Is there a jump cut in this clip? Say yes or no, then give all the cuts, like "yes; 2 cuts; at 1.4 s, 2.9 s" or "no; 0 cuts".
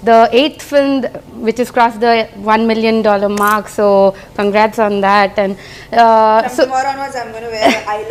no; 0 cuts